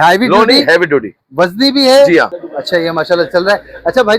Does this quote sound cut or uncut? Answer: cut